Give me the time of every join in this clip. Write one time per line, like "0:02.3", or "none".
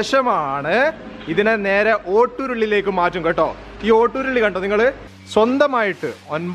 0:05.1